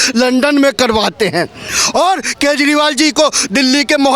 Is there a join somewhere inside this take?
no; 0 cuts

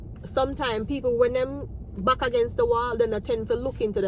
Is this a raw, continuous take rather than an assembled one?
yes; 0 cuts

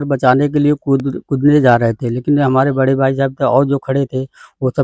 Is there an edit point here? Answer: no; 0 cuts

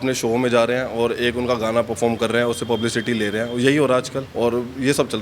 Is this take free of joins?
no; 1 cut; at 4.2 s

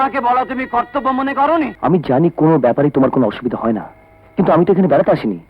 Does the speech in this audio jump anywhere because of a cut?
yes; 1 cut; at 1.7 s

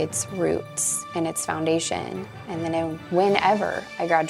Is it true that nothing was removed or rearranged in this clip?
yes; 0 cuts

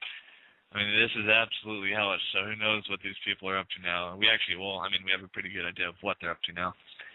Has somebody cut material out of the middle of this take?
no; 0 cuts

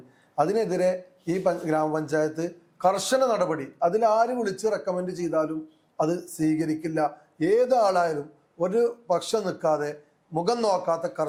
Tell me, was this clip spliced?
no; 0 cuts

